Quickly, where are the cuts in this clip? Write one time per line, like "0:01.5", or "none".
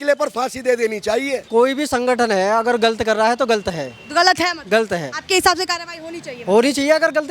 0:01.4